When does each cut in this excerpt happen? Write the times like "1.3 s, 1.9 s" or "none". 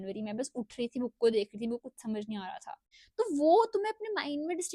2.9 s